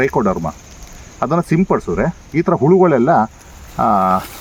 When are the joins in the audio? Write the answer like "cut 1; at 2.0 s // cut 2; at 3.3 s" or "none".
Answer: none